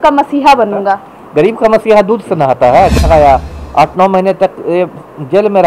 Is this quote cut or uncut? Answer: cut